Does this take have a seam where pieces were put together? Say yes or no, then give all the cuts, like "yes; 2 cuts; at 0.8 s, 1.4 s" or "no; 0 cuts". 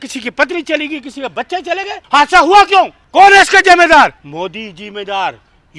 yes; 3 cuts; at 2.0 s, 3.0 s, 4.2 s